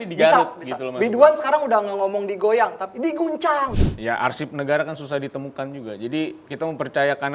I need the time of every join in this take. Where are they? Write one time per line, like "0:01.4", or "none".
0:03.8